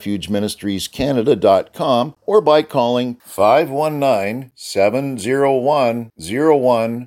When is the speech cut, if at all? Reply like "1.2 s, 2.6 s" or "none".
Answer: 2.2 s